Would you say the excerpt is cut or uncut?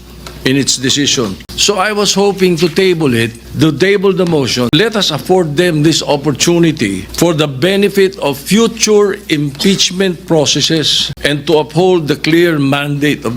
cut